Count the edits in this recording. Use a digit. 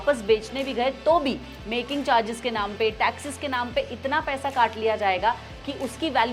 0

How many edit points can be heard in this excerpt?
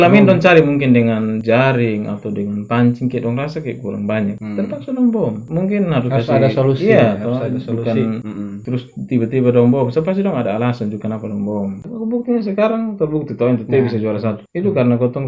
1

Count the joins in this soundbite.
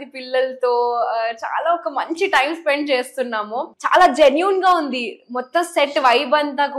1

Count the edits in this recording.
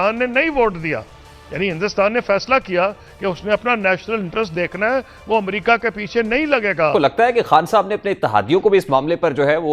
1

